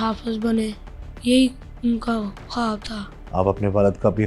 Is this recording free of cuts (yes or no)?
yes